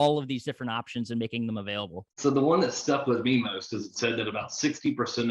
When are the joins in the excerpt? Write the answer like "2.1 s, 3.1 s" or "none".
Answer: 2.0 s